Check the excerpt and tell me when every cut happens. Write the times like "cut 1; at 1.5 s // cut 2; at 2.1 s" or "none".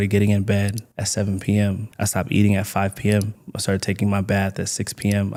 none